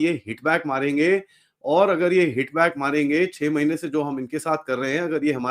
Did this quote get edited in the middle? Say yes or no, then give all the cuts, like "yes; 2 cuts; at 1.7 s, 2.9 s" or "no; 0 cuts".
no; 0 cuts